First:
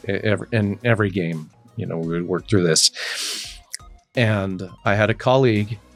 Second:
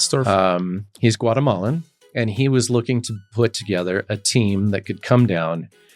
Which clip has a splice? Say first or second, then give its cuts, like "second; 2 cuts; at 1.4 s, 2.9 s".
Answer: second; 1 cut; at 1.9 s